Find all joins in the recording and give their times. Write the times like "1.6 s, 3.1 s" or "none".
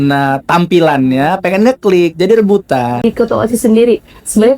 3.0 s